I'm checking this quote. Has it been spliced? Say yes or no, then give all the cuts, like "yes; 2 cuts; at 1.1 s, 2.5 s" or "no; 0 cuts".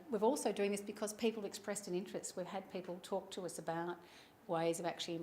yes; 1 cut; at 1.8 s